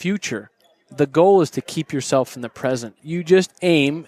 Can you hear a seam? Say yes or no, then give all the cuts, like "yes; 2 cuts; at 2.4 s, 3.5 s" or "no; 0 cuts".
yes; 1 cut; at 3.0 s